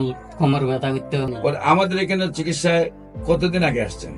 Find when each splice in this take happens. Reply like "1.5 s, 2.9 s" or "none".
1.3 s